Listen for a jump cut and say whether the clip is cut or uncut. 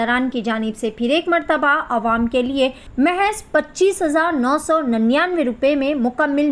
cut